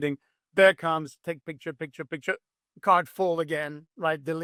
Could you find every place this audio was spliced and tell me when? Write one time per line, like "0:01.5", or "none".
none